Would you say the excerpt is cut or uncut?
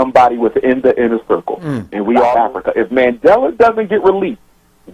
cut